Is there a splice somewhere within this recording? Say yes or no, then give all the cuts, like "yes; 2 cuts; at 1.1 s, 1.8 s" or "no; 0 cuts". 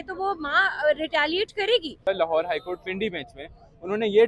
yes; 1 cut; at 2.0 s